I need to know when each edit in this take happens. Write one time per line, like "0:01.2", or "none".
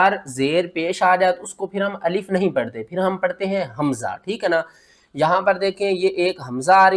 none